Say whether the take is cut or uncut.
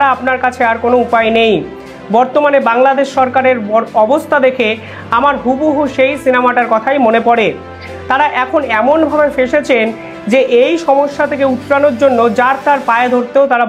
uncut